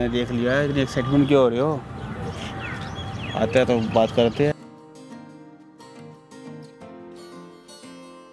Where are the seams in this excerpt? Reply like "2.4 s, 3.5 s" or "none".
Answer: 4.6 s